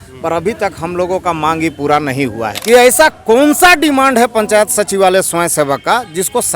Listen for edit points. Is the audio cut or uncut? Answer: cut